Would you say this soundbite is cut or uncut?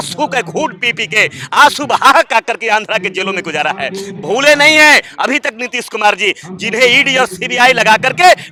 uncut